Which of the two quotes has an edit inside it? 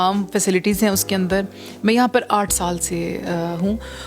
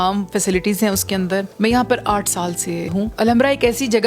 second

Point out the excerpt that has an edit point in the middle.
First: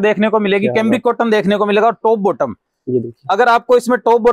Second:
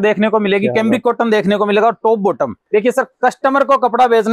second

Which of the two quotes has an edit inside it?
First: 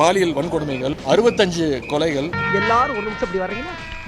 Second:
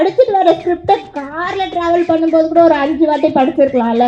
first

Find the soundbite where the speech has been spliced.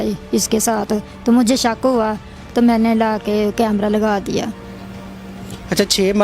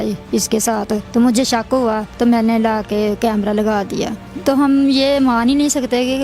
second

